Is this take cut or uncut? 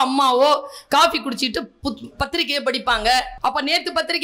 cut